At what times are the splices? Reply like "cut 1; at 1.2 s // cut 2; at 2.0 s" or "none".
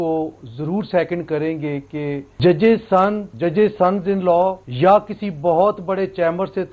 cut 1; at 2.3 s // cut 2; at 3.3 s // cut 3; at 4.6 s

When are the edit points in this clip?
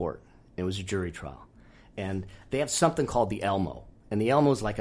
none

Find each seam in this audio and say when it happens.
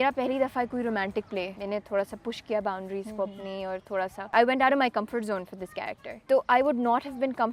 cut 1; at 1.6 s // cut 2; at 4.2 s // cut 3; at 6.1 s

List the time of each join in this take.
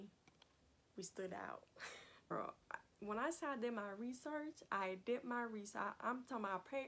cut 1; at 2.3 s

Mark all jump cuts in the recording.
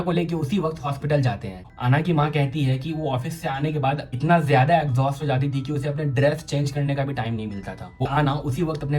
cut 1; at 1.5 s // cut 2; at 8.1 s

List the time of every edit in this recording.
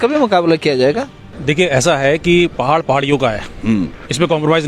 cut 1; at 1.3 s

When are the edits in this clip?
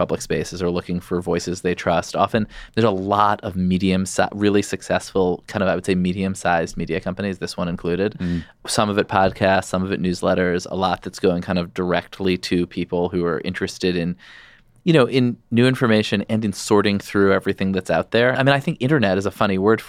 cut 1; at 8.5 s // cut 2; at 18.3 s

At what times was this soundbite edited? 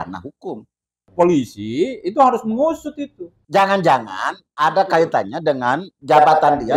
cut 1; at 1.0 s

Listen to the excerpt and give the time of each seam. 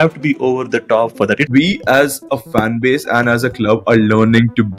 cut 1; at 1.4 s

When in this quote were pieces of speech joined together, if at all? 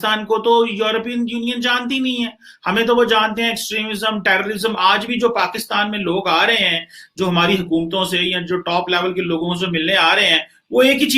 none

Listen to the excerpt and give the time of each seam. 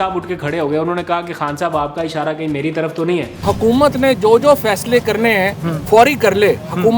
cut 1; at 3.4 s

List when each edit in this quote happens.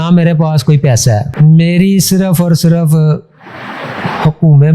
cut 1; at 1.3 s

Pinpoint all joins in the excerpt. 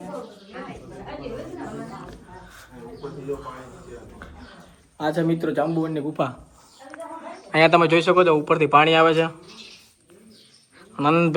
none

